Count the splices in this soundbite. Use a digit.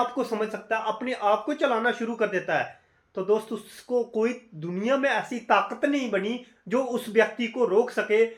0